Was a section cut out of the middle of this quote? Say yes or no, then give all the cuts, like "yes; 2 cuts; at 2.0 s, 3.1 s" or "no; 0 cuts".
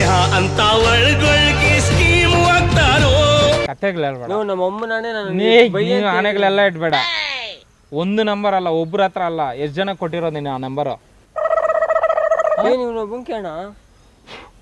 no; 0 cuts